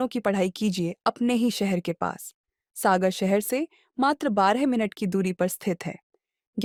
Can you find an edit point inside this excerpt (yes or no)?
no